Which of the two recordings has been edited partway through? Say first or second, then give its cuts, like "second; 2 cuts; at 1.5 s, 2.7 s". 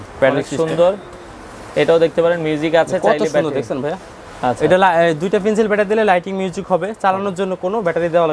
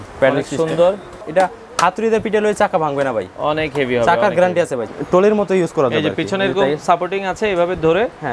second; 2 cuts; at 1.2 s, 4.9 s